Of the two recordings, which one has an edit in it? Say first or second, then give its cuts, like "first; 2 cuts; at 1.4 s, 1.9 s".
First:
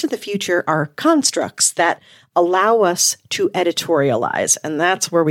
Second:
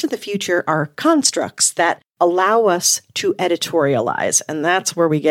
second; 1 cut; at 2.0 s